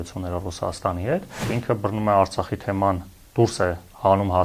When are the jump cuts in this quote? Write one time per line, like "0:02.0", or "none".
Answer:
0:01.5